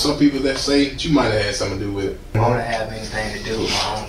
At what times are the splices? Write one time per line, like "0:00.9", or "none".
0:01.0
0:02.4